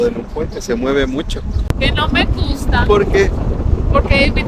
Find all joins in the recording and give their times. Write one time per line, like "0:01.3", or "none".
0:01.6